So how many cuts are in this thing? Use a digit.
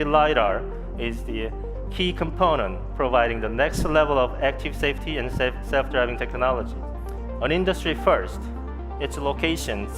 1